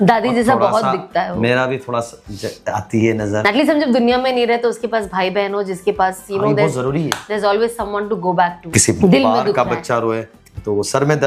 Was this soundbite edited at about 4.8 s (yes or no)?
no